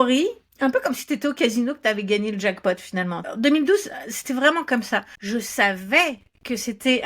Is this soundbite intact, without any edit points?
no; 2 cuts; at 3.3 s, 5.1 s

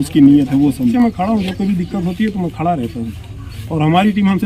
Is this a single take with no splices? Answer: no; 1 cut; at 0.9 s

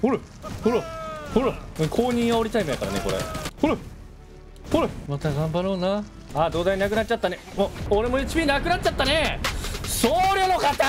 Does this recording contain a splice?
yes; 5 cuts; at 1.7 s, 3.5 s, 5.0 s, 6.2 s, 7.8 s

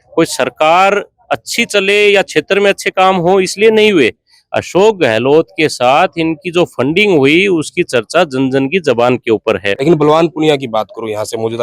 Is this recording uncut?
no; 1 cut; at 9.7 s

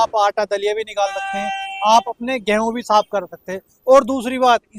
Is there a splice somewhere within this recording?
no; 0 cuts

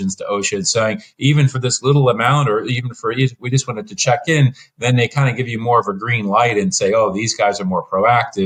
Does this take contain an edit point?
no; 0 cuts

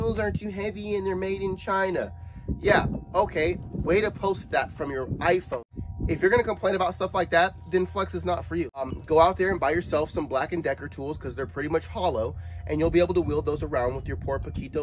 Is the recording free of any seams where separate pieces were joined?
no; 2 cuts; at 5.6 s, 8.9 s

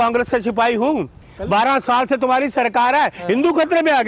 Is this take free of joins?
no; 1 cut; at 1.1 s

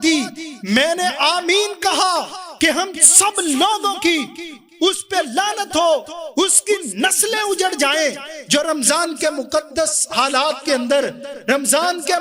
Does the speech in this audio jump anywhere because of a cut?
no; 0 cuts

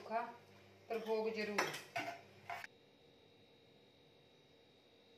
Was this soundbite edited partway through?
yes; 1 cut; at 2.6 s

